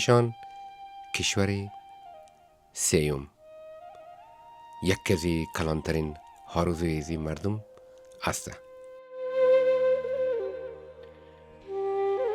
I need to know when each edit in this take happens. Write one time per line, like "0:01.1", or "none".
none